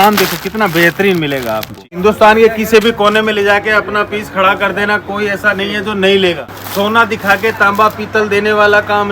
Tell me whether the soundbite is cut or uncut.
cut